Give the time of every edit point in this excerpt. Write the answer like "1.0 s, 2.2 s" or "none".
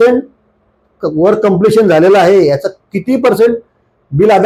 none